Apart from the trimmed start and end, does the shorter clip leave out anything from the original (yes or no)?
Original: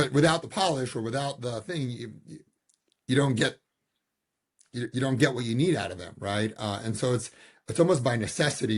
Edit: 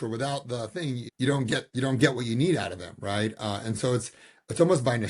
yes